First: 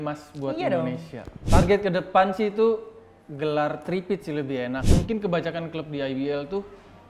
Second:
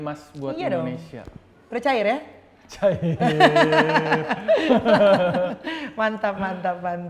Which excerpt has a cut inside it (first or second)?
first